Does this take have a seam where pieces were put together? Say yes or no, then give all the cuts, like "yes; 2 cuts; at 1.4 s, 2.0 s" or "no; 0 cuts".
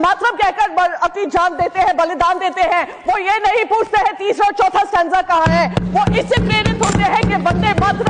no; 0 cuts